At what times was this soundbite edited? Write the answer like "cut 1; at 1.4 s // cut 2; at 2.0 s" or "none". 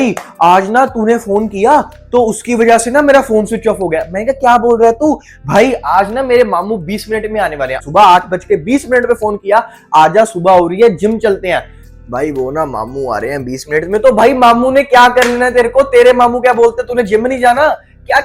cut 1; at 7.8 s